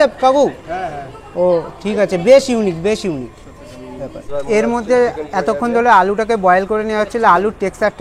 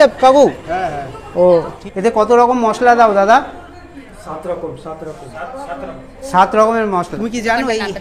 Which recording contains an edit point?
second; 2 cuts; at 1.7 s, 7.1 s

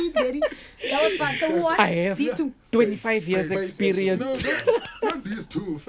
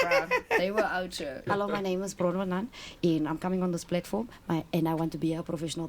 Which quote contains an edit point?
second; 1 cut; at 1.4 s

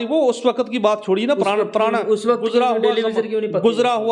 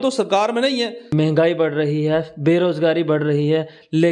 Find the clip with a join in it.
second; 1 cut; at 1.1 s

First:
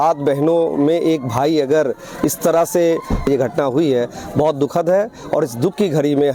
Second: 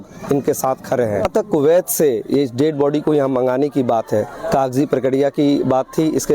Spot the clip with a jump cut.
second; 1 cut; at 1.3 s

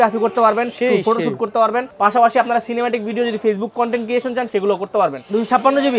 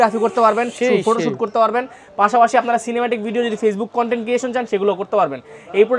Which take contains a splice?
first; 2 cuts; at 1.9 s, 5.2 s

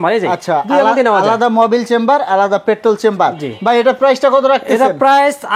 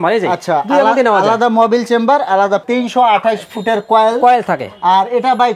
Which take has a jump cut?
second; 1 cut; at 2.6 s

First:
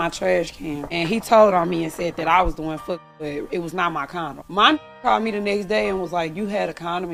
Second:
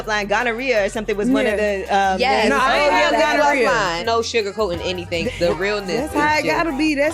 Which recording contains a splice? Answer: second; 2 cuts; at 4.0 s, 5.2 s

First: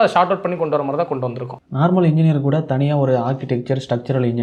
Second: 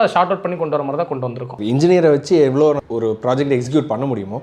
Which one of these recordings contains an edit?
second; 2 cuts; at 1.5 s, 2.8 s

